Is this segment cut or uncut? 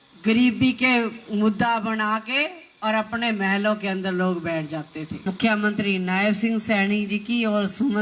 cut